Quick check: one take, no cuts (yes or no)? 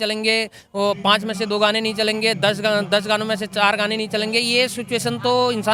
yes